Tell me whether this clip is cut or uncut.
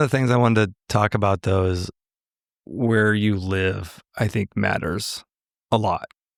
uncut